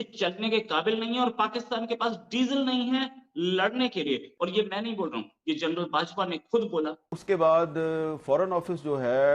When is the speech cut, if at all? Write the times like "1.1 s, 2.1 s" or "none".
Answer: 4.3 s, 7.1 s